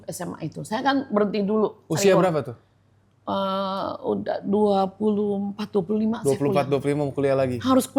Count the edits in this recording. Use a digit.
0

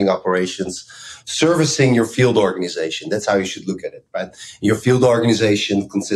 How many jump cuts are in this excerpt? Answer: 0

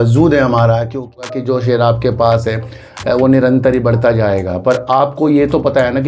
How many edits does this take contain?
1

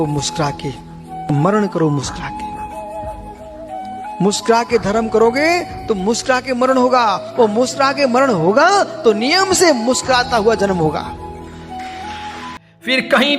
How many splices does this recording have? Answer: 1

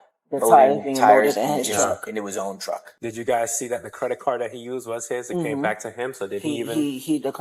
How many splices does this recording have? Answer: 1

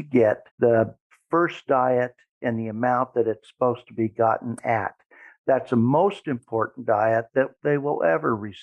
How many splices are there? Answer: 1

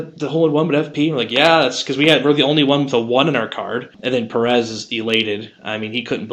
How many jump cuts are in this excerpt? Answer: 1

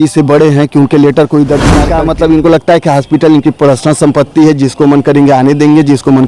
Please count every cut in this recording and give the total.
1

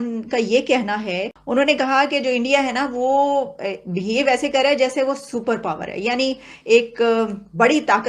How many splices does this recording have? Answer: 1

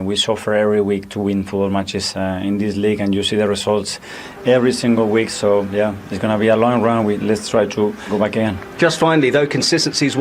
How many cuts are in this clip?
1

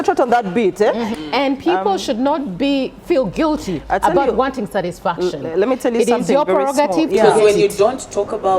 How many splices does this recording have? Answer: 1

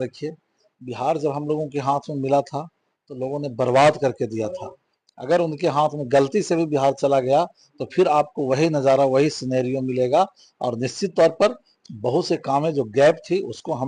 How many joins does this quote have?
0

